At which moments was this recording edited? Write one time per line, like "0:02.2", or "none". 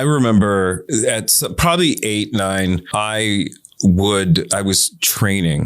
0:00.8
0:02.9